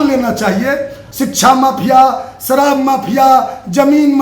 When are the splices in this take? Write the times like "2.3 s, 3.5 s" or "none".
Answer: 1.0 s

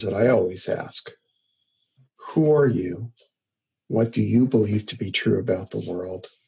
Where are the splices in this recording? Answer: none

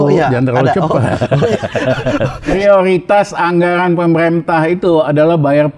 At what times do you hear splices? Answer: 2.5 s

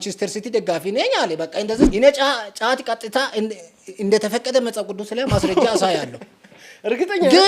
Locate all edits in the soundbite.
1.9 s

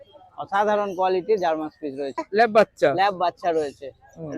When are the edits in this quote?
2.3 s

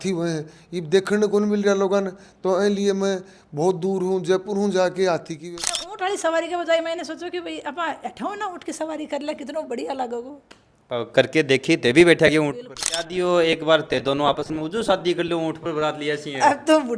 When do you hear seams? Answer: 5.8 s, 13.1 s

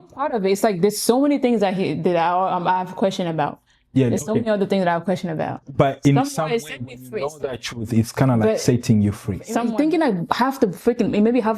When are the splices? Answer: 9.6 s

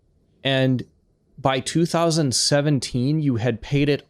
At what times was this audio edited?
none

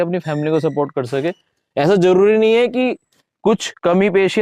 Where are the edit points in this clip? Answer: none

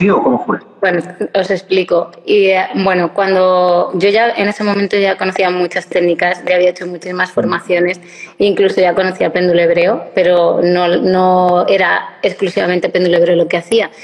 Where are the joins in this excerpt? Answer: none

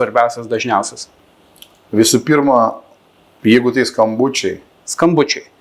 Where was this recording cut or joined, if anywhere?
none

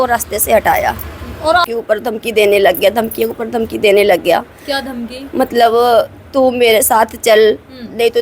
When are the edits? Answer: 1.6 s

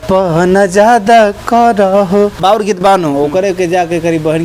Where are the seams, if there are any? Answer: 2.4 s

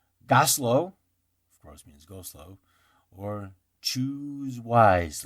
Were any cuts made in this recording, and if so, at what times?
none

